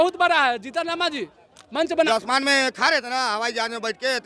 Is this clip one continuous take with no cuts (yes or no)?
no